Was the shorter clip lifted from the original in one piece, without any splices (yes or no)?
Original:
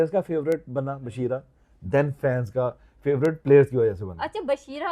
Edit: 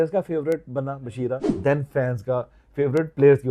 no